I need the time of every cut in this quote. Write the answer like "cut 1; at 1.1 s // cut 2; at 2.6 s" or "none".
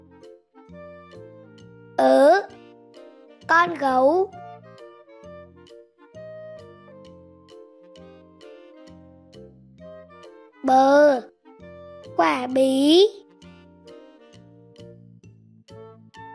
cut 1; at 1.9 s // cut 2; at 4.7 s // cut 3; at 10.6 s // cut 4; at 13.7 s